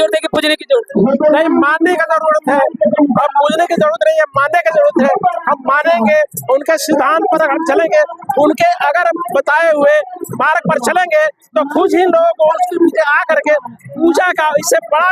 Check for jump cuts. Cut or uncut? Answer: uncut